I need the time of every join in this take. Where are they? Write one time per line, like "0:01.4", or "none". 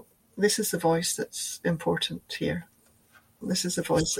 none